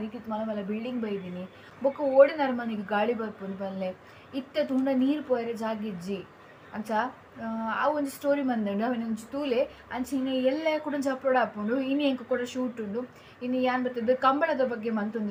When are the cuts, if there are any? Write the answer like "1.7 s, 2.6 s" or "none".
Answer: none